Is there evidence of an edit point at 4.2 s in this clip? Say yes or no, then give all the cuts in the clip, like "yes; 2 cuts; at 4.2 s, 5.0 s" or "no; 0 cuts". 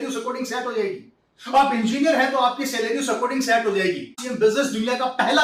yes; 1 cut; at 4.2 s